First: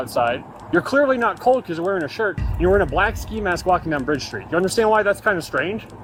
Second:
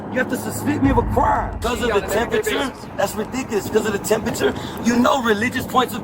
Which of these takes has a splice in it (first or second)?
second